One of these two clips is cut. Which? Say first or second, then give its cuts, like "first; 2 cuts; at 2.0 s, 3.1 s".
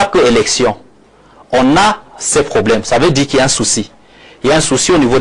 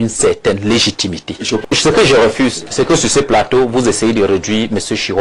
second; 1 cut; at 1.7 s